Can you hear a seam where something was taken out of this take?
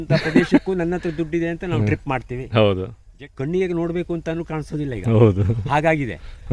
yes; 1 cut; at 3.0 s

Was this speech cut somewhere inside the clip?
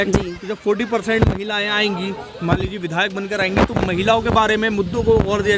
no; 0 cuts

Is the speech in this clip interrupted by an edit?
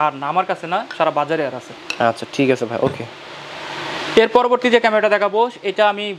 no; 0 cuts

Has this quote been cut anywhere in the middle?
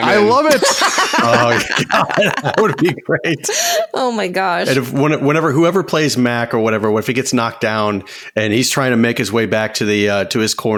no; 0 cuts

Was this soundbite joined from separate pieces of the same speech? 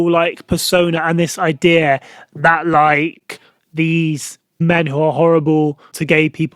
no; 0 cuts

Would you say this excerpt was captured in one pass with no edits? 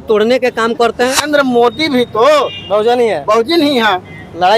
no; 1 cut; at 1.2 s

